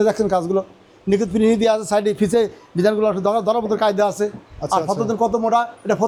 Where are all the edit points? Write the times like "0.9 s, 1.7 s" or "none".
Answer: none